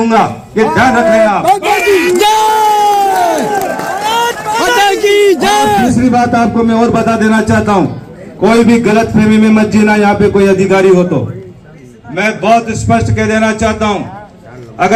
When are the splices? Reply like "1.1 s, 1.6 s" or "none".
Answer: none